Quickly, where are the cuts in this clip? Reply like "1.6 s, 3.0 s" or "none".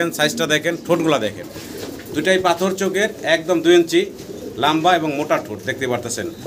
none